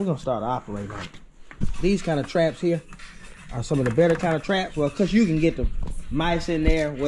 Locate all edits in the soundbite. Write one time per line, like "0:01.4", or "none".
0:01.6